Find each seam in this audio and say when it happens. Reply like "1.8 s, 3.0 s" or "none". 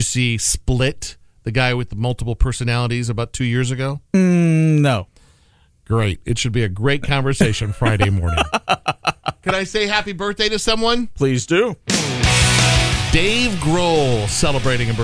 none